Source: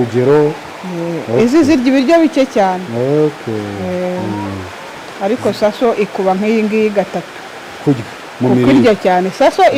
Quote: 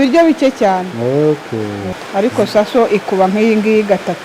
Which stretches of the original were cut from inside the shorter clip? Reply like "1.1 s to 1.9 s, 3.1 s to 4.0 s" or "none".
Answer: 3.8 s to 4.9 s